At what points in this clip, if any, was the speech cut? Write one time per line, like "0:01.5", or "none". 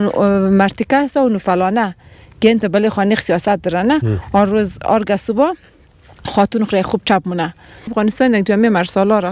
0:07.9